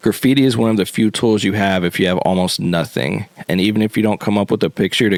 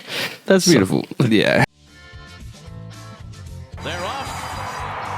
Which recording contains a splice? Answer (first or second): second